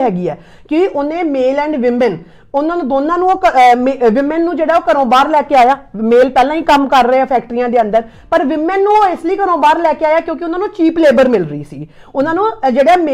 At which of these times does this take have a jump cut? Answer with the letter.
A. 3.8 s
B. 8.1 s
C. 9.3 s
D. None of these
D